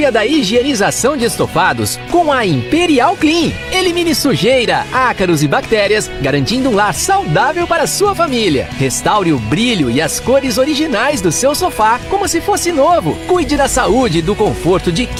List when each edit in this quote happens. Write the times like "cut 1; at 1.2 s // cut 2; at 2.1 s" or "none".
none